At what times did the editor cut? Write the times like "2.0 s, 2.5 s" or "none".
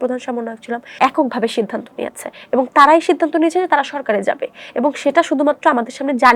0.9 s